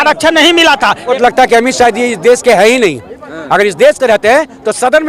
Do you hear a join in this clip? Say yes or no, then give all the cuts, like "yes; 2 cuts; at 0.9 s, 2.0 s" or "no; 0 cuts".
yes; 1 cut; at 1.1 s